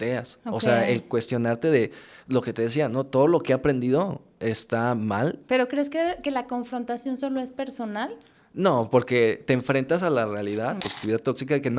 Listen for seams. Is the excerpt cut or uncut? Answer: cut